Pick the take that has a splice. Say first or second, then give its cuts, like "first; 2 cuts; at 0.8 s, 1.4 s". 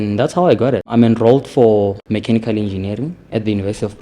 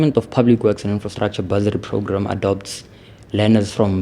first; 2 cuts; at 0.9 s, 2.0 s